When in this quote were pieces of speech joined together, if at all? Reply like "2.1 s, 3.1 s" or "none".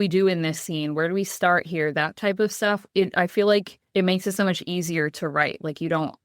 2.9 s, 3.8 s